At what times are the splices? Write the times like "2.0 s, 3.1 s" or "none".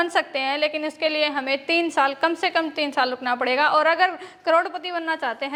none